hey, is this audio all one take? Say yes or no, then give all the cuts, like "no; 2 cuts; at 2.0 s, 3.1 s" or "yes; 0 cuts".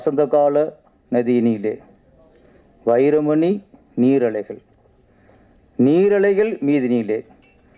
yes; 0 cuts